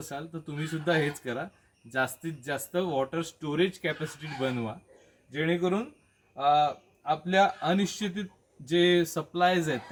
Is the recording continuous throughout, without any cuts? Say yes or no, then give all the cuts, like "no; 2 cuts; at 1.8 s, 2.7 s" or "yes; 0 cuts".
yes; 0 cuts